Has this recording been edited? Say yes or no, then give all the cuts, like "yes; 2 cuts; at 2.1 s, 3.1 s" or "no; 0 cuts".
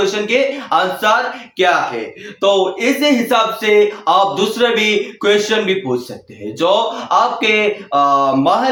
no; 0 cuts